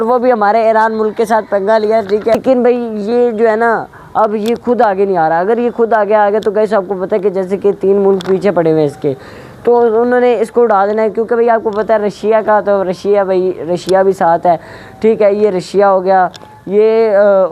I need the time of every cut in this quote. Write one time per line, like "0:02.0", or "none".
0:02.4